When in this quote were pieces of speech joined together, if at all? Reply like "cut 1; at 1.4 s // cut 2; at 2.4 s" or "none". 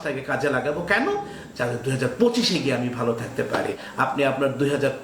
cut 1; at 3.8 s